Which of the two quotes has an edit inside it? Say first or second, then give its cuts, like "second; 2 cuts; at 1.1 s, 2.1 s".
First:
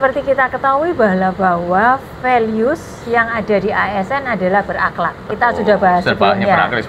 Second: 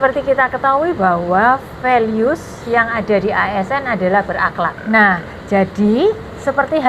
second; 2 cuts; at 0.9 s, 4.8 s